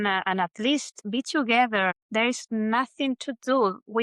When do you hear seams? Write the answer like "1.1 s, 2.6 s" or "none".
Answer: 1.0 s, 2.0 s

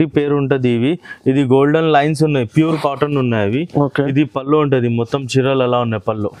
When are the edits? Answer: none

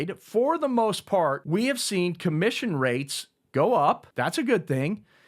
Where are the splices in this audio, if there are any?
1.4 s, 4.1 s

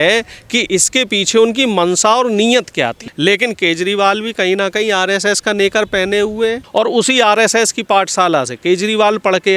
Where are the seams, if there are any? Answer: 3.0 s, 6.6 s

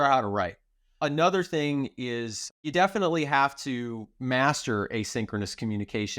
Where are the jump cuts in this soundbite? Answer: 4.1 s

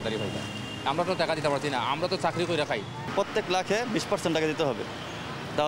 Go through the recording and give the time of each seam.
none

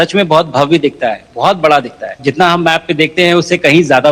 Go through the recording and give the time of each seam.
2.2 s

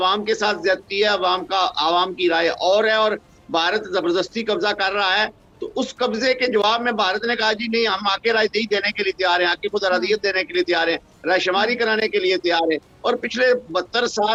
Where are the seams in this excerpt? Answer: none

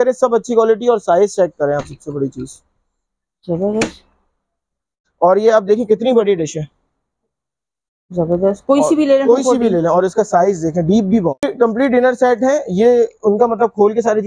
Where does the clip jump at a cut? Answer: 5.0 s, 11.5 s

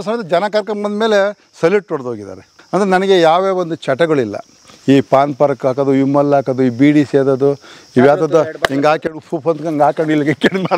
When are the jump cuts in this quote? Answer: 2.6 s

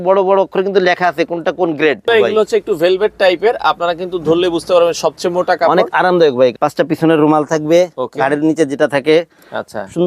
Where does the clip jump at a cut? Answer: 2.1 s, 6.5 s

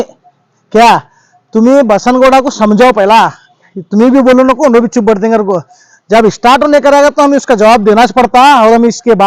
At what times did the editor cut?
none

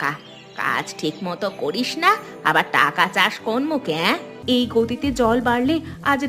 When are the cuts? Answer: 4.3 s

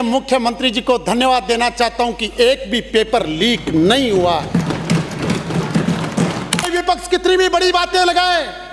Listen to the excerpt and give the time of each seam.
6.7 s

